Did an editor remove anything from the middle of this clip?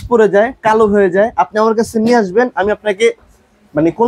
no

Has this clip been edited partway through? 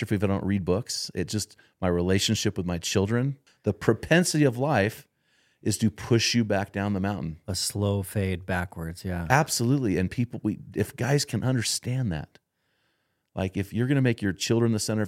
yes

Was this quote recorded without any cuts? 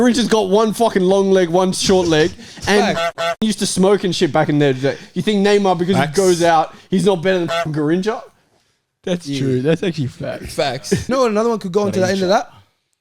no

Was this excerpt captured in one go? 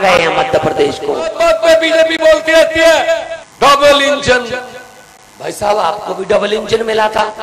no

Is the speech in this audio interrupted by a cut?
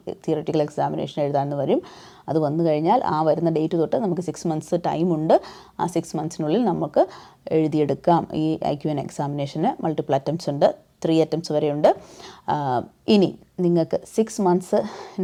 no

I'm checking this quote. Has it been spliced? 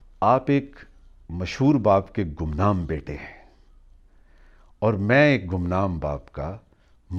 no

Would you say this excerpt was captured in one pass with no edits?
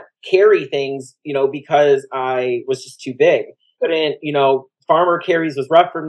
no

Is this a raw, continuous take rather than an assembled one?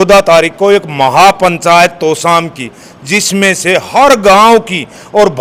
yes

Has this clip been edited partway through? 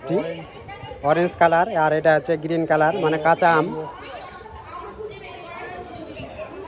no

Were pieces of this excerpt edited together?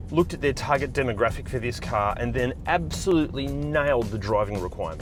no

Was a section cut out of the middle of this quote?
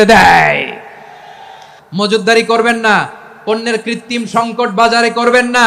yes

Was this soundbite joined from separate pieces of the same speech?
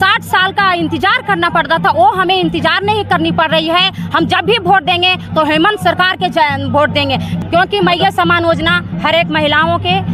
no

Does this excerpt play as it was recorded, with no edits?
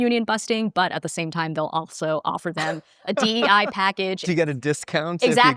no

